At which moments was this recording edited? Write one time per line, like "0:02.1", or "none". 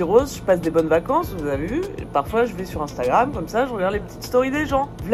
none